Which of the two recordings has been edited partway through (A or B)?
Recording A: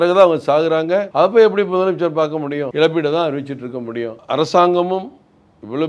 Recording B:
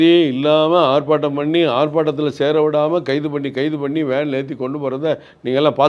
A